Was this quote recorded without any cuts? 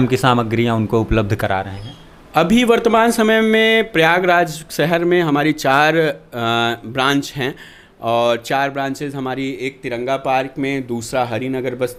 yes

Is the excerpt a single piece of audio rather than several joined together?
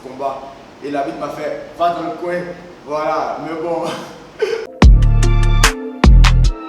no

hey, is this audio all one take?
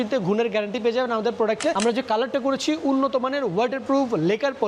no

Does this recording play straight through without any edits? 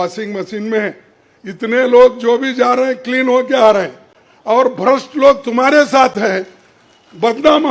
yes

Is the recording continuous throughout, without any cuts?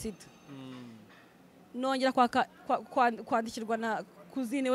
yes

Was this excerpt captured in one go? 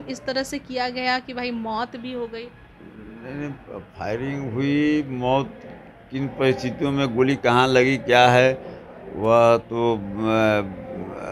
yes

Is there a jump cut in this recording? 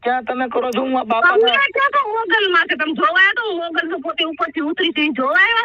no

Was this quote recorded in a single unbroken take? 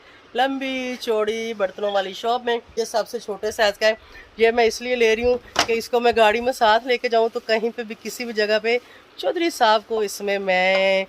no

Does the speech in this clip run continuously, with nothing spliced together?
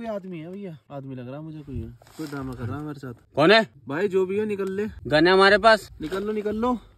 no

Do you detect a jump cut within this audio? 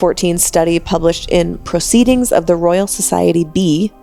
no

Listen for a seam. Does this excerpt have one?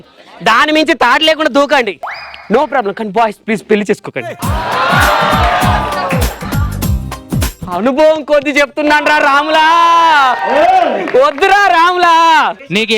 no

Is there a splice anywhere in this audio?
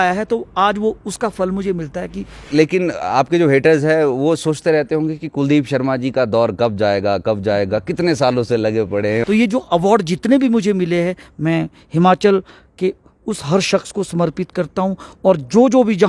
yes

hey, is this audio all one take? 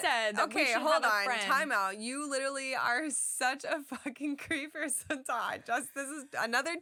yes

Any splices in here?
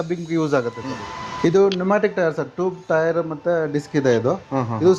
yes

